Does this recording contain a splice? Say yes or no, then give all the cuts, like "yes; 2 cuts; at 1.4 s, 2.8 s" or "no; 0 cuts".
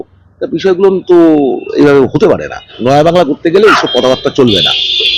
yes; 1 cut; at 2.7 s